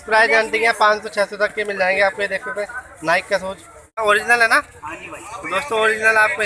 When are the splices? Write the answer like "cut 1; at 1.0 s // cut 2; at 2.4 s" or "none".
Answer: cut 1; at 4.0 s